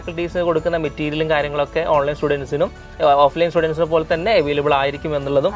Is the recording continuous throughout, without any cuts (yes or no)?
yes